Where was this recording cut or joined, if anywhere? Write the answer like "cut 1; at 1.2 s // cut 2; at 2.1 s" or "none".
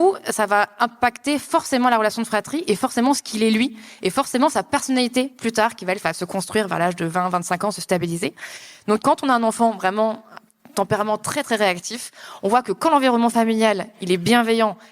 cut 1; at 9.0 s